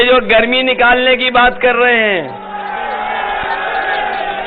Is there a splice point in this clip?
no; 0 cuts

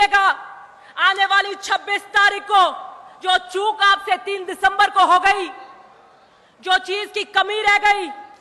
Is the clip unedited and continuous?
yes; 0 cuts

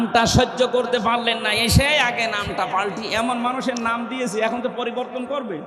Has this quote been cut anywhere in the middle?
no; 0 cuts

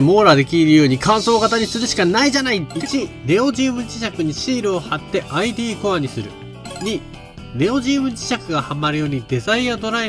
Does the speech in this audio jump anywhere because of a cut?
yes; 2 cuts; at 2.7 s, 6.5 s

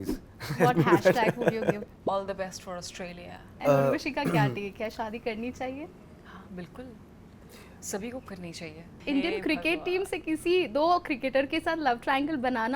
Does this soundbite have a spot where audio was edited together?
yes; 4 cuts; at 1.9 s, 3.5 s, 6.0 s, 8.9 s

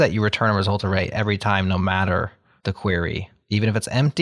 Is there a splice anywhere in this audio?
no; 0 cuts

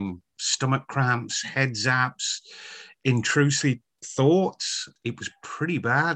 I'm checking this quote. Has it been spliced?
yes; 1 cut; at 4.8 s

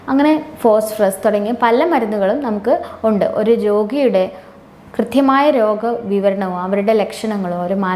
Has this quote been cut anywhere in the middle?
no; 0 cuts

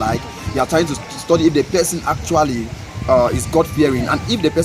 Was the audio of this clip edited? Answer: no; 0 cuts

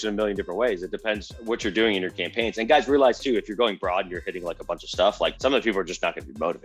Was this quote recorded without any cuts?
no; 2 cuts; at 1.3 s, 5.4 s

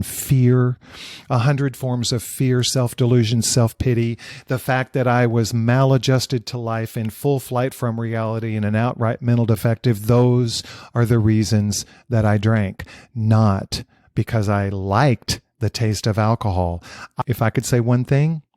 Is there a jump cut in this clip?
yes; 1 cut; at 17.2 s

